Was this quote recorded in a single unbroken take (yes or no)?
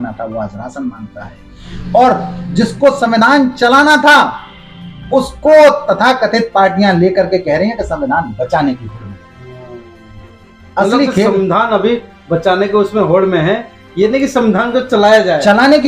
yes